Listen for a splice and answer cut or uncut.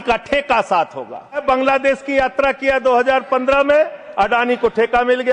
cut